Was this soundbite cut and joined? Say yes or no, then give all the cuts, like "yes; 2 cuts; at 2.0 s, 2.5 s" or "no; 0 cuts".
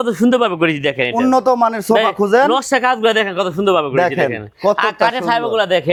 no; 0 cuts